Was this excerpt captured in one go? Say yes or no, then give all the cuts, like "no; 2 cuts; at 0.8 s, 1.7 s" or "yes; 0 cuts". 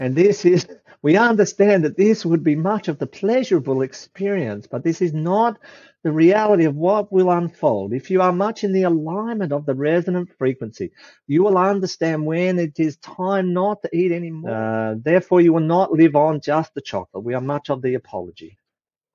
no; 1 cut; at 14.3 s